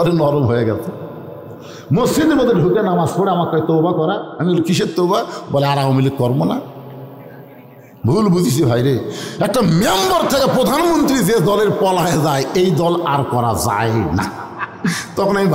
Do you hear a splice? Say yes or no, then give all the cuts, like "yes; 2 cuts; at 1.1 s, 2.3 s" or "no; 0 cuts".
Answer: no; 0 cuts